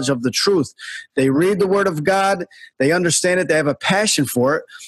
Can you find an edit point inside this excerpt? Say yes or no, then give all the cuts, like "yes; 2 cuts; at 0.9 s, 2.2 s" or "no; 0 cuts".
no; 0 cuts